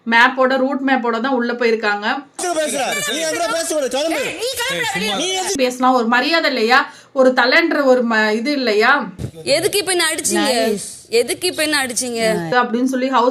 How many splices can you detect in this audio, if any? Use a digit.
4